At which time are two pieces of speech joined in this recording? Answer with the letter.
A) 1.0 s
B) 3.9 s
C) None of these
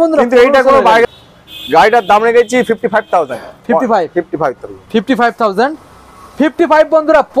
A